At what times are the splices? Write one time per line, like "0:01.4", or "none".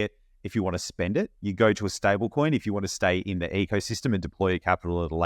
0:01.4